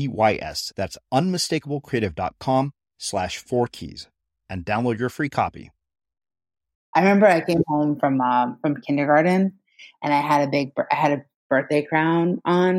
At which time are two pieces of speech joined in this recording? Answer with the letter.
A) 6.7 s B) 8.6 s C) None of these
A